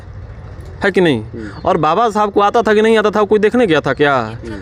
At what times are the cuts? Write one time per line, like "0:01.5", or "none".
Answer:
none